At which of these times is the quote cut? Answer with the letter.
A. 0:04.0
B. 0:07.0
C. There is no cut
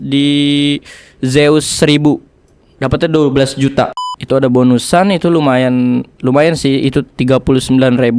A